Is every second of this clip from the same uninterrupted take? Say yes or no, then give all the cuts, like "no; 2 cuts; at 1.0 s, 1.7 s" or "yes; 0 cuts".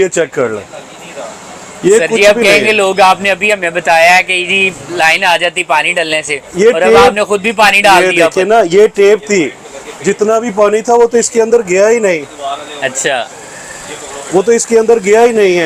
yes; 0 cuts